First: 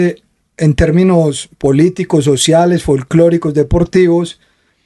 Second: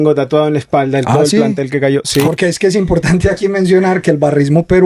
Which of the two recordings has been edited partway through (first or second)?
second